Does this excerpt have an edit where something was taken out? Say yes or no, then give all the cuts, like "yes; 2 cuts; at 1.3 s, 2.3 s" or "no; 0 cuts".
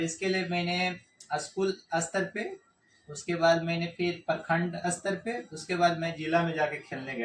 no; 0 cuts